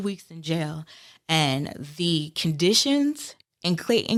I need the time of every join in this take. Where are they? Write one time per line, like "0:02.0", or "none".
none